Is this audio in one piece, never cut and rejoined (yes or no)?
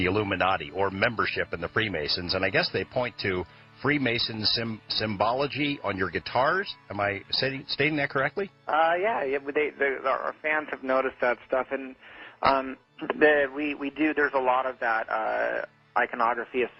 no